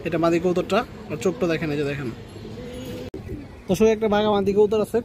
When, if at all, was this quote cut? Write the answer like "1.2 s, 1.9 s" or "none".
3.1 s